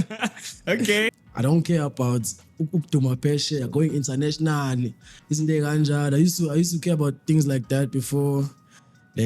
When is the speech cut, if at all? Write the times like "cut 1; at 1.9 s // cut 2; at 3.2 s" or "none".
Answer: cut 1; at 1.2 s